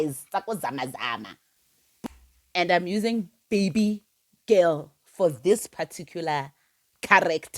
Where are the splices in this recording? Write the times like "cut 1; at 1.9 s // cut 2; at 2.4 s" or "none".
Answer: cut 1; at 2.1 s